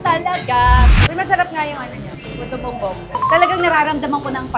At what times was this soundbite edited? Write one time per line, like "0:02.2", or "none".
0:00.9